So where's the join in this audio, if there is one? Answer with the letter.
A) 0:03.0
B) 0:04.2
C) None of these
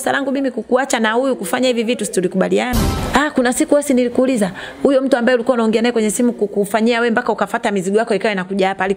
A